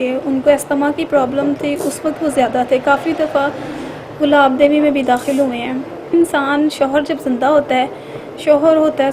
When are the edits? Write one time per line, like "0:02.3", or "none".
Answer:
0:06.1